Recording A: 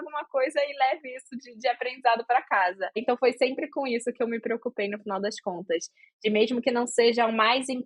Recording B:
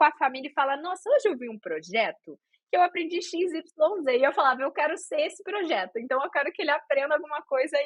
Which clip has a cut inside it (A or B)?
A